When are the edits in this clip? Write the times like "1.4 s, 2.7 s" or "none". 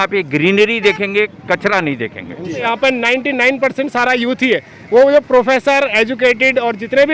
2.7 s